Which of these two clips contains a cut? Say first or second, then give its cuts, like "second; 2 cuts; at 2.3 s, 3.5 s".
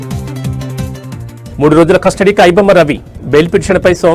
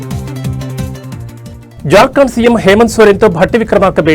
first; 1 cut; at 1.3 s